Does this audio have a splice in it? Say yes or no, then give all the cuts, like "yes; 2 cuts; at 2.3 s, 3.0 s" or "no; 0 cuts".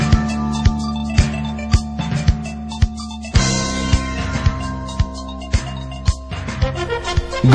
yes; 1 cut; at 5.7 s